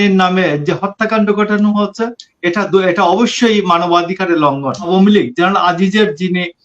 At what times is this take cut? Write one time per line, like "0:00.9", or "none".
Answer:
0:04.9